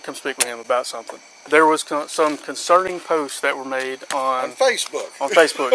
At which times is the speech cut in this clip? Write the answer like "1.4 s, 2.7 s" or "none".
1.4 s

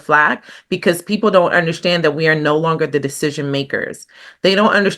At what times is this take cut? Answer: none

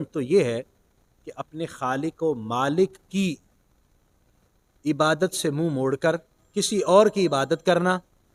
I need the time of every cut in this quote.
none

